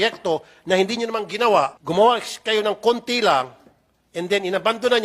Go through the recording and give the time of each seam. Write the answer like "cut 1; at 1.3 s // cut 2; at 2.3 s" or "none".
cut 1; at 1.8 s